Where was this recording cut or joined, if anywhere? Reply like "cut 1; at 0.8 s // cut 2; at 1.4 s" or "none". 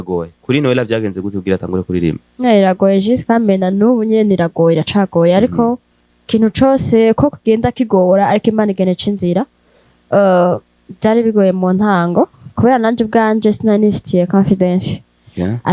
none

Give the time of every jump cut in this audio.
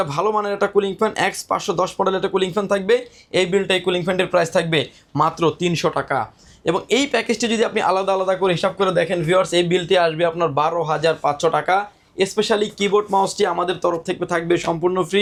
none

